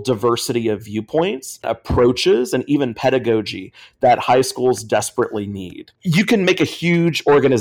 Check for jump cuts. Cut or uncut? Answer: cut